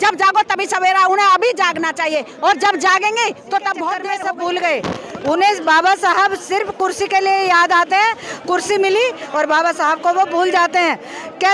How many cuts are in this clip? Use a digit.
1